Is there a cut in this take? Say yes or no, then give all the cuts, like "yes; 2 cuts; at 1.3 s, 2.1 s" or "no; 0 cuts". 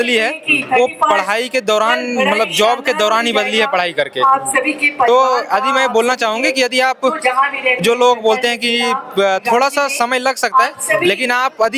no; 0 cuts